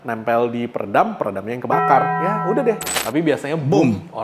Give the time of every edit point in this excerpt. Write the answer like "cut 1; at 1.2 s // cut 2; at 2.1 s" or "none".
cut 1; at 2.9 s